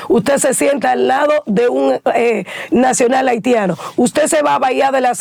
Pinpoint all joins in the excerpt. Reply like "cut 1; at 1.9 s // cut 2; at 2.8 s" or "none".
none